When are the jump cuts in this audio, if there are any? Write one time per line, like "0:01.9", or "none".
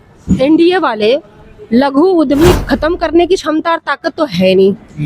0:02.5